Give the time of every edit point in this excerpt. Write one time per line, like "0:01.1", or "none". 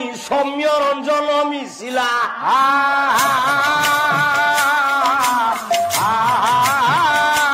none

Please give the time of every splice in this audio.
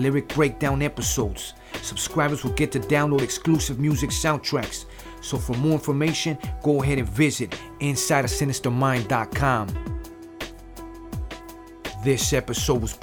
0:09.8
0:12.0

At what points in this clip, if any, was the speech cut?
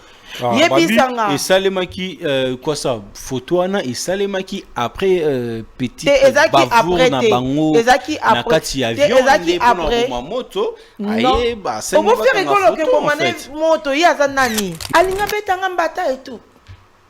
0:14.8

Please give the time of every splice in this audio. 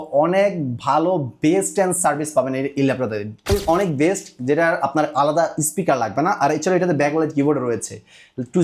0:03.5

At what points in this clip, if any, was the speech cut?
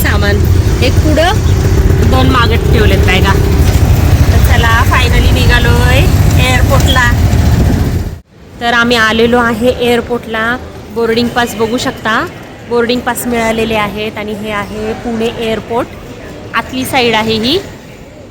0:08.0

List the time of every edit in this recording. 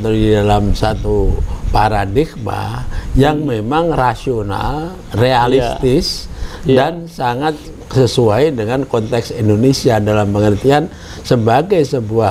none

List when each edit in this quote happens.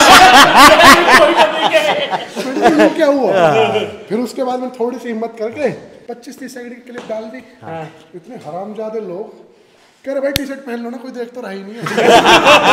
0:05.9

